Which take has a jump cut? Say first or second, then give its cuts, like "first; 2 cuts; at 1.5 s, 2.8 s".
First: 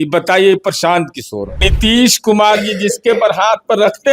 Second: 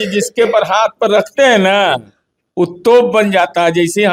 first; 1 cut; at 1.7 s